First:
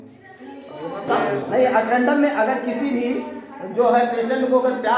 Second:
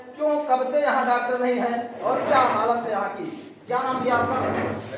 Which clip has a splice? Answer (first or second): first